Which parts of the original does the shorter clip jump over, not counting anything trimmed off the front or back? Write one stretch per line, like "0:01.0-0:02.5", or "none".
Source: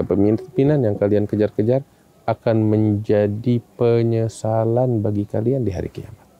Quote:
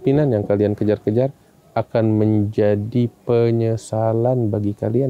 none